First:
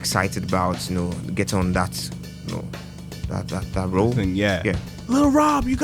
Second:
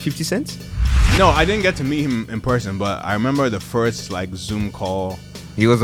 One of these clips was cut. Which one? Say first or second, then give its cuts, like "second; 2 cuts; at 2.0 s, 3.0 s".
first; 1 cut; at 4.9 s